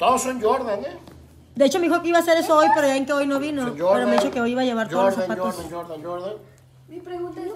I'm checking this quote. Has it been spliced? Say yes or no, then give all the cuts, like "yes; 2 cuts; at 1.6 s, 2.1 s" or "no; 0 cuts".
no; 0 cuts